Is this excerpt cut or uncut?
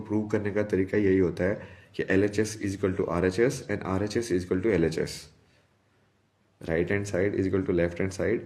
uncut